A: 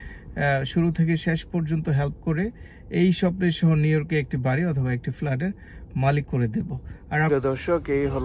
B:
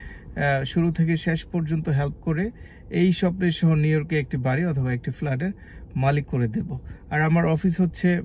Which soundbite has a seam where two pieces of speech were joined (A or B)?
A